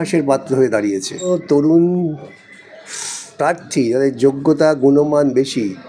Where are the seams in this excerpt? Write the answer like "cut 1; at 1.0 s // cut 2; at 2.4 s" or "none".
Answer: cut 1; at 1.3 s